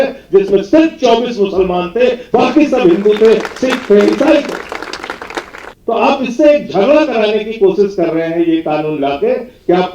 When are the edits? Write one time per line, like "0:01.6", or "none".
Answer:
0:05.6